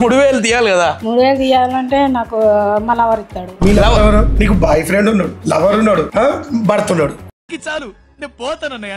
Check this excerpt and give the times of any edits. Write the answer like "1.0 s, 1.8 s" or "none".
1.0 s